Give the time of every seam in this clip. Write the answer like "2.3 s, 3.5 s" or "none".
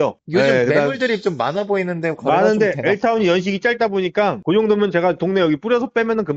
none